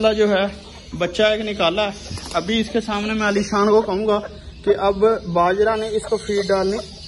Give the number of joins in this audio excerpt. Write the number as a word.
zero